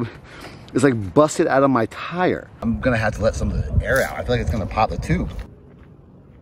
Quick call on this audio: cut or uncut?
cut